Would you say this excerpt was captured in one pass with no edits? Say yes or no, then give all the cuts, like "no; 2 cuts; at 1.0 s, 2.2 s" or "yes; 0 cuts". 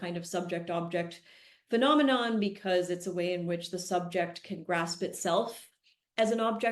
yes; 0 cuts